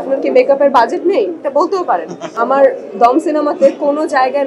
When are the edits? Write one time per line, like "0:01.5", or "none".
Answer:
0:02.3